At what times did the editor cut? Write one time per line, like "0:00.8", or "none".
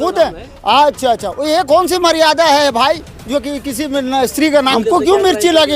0:04.7